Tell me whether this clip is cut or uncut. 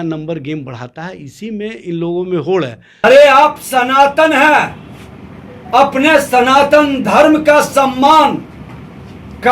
cut